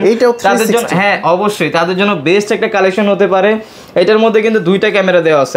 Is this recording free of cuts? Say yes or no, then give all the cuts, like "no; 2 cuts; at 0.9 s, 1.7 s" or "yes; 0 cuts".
yes; 0 cuts